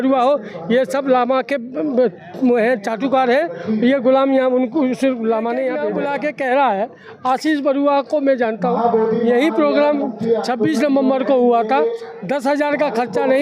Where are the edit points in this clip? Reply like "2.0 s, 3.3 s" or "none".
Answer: 5.8 s